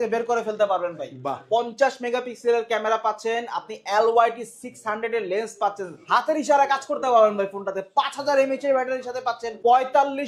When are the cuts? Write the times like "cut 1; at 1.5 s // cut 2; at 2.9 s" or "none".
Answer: cut 1; at 1.3 s // cut 2; at 6.1 s

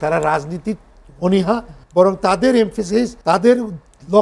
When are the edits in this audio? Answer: cut 1; at 1.8 s // cut 2; at 3.2 s

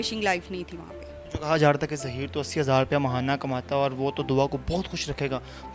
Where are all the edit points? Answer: none

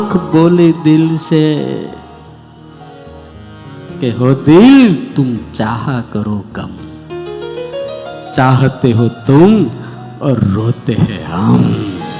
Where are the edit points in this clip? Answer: none

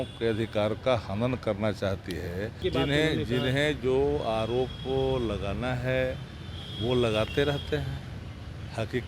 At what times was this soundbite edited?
cut 1; at 2.6 s

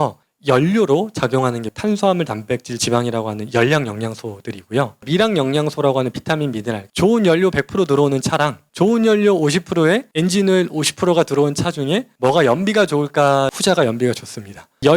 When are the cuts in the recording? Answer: cut 1; at 6.9 s // cut 2; at 13.5 s

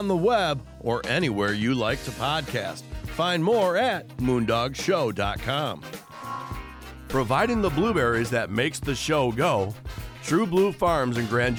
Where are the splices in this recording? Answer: none

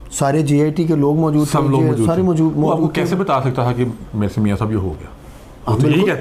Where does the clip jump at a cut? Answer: none

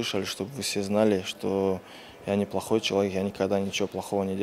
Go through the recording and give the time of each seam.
none

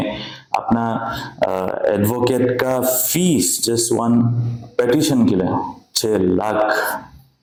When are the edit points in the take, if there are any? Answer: none

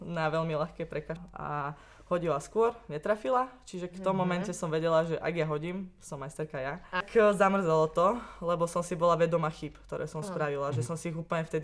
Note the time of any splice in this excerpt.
cut 1; at 1.2 s // cut 2; at 7.0 s

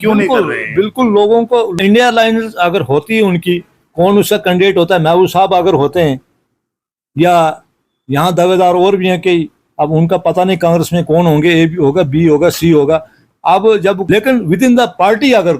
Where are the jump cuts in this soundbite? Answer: cut 1; at 1.7 s // cut 2; at 14.0 s

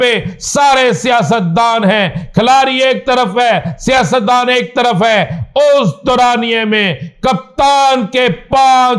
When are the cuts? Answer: none

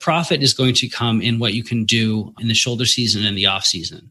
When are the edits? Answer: cut 1; at 2.3 s

